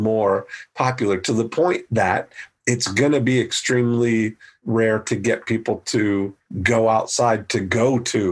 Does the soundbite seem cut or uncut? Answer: cut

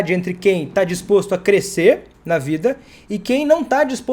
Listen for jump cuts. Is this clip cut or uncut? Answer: uncut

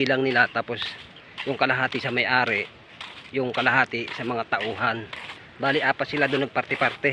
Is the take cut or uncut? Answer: uncut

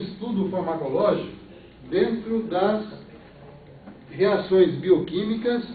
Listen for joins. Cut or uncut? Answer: uncut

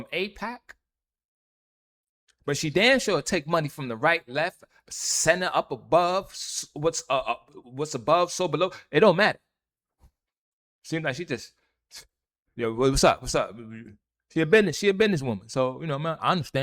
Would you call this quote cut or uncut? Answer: uncut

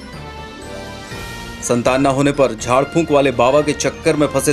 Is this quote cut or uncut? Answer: cut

